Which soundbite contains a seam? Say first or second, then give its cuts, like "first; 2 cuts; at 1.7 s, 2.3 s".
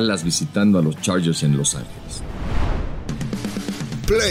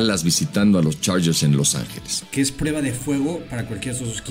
second; 1 cut; at 2.1 s